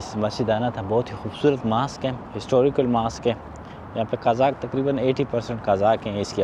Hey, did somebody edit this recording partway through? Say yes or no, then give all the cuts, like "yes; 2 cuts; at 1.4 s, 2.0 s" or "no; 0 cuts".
no; 0 cuts